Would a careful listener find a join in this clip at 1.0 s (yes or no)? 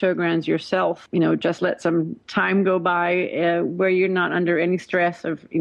yes